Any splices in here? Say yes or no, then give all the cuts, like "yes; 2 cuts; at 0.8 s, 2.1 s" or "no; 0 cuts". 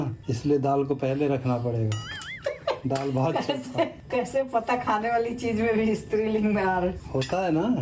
no; 0 cuts